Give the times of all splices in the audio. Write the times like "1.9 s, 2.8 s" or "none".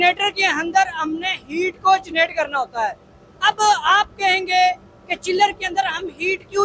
none